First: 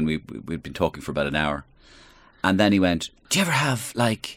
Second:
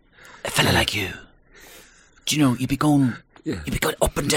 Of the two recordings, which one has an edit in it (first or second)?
first